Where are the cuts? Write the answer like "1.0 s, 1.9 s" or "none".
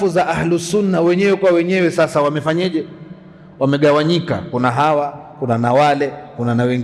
none